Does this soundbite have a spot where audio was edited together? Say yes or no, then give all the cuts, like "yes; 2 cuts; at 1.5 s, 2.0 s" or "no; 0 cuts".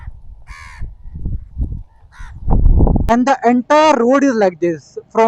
yes; 1 cut; at 3.1 s